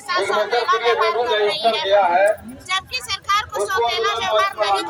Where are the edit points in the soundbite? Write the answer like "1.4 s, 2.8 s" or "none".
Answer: none